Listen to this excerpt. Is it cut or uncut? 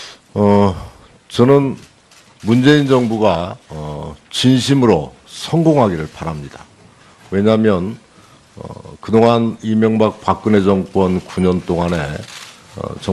uncut